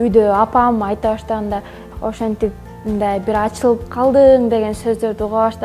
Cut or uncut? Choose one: cut